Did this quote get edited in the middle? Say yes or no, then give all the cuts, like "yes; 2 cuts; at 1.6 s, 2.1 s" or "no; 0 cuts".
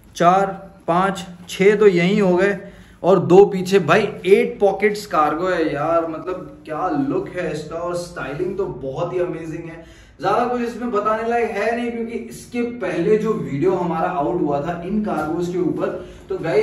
no; 0 cuts